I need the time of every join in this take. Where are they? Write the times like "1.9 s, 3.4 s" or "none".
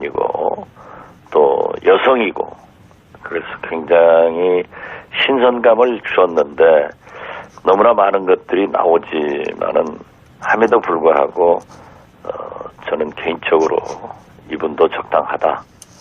1.6 s